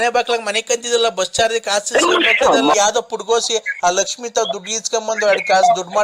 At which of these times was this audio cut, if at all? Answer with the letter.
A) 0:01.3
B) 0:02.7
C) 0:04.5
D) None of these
B